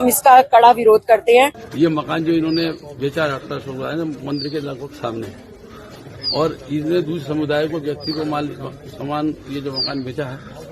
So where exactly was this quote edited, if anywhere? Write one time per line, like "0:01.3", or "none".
0:01.6